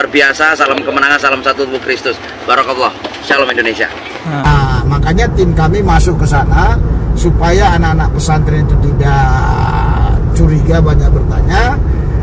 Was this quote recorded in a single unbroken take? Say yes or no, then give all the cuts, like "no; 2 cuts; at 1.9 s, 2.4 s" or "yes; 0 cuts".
no; 1 cut; at 4.5 s